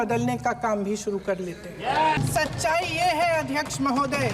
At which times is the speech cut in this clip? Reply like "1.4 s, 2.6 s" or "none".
2.2 s